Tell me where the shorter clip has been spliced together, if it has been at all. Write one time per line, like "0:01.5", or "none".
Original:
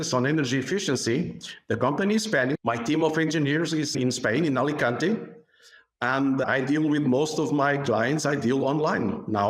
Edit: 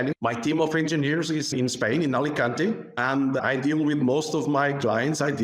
0:02.9